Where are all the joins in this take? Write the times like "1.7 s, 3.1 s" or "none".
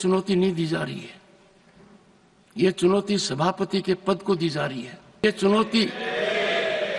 5.2 s